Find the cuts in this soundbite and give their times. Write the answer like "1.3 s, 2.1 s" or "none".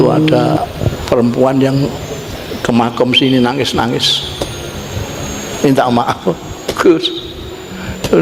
none